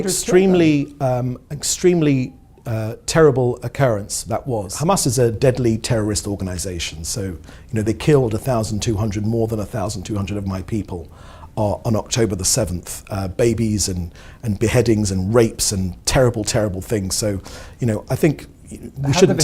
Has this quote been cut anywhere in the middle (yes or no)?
yes